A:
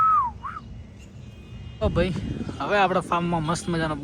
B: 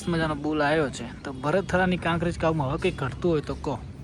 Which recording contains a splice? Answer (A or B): A